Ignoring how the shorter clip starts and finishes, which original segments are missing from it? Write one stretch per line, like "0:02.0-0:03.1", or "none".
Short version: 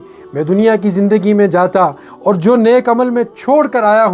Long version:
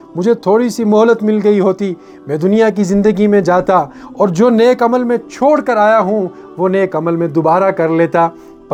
none